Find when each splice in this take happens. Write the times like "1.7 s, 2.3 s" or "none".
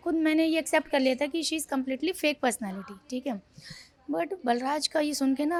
none